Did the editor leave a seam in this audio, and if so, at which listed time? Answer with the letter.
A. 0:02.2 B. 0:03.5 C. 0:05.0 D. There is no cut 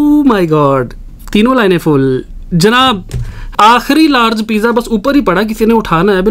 B